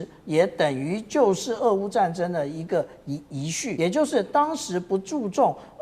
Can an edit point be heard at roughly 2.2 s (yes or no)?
no